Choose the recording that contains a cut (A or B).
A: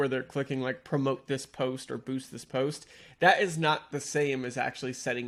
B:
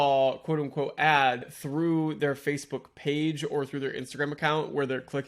B